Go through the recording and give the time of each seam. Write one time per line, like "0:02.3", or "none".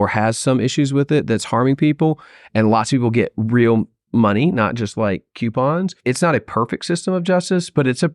0:06.0